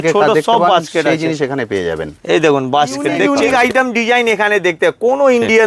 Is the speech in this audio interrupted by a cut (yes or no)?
yes